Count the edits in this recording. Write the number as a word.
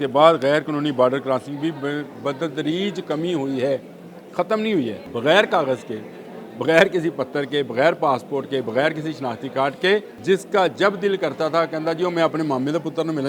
two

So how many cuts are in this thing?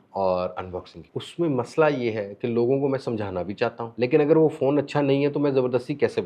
two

